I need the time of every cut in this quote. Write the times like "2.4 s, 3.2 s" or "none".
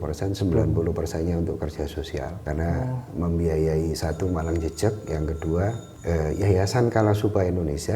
2.4 s, 5.9 s